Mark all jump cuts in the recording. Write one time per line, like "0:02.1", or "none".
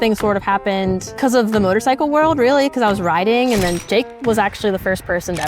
0:01.1
0:03.8